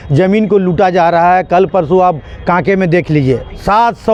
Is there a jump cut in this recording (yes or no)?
no